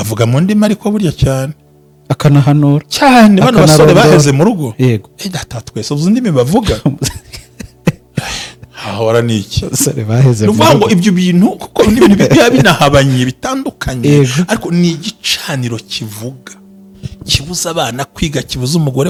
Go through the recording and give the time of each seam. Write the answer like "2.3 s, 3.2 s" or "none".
none